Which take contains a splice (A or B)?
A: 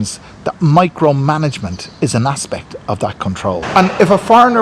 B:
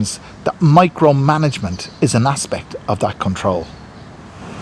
A